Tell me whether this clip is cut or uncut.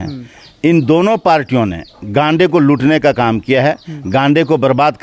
uncut